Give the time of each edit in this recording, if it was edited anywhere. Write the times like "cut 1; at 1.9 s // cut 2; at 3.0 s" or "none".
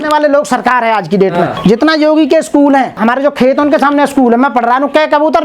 cut 1; at 1.5 s // cut 2; at 3.0 s